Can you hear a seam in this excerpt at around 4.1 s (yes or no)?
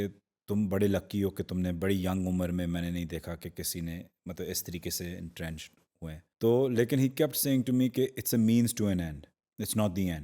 no